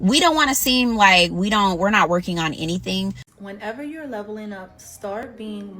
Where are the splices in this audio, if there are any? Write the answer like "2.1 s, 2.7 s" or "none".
3.3 s